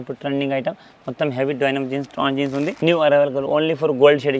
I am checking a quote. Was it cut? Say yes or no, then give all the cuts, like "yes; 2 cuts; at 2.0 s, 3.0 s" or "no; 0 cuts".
yes; 1 cut; at 2.7 s